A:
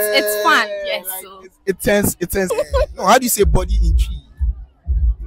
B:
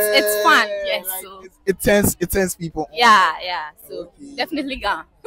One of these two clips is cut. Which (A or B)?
A